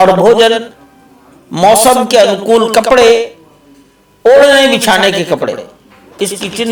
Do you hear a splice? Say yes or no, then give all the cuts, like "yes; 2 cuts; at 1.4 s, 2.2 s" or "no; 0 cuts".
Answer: no; 0 cuts